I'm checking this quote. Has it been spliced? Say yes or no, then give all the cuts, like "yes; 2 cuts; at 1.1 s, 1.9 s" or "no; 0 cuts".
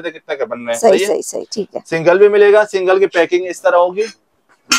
no; 0 cuts